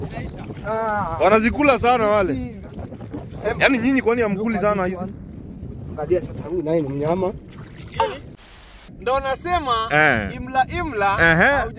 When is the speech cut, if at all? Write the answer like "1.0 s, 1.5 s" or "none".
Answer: 8.3 s